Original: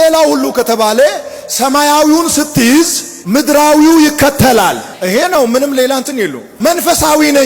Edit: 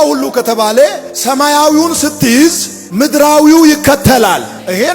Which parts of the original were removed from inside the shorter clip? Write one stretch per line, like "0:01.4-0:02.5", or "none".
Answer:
0:01.3-0:01.4